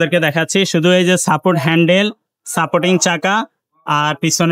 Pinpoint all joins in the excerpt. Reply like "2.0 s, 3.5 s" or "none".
none